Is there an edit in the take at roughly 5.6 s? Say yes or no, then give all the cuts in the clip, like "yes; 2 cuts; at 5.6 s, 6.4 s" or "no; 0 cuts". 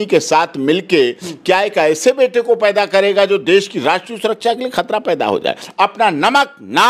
yes; 1 cut; at 5.6 s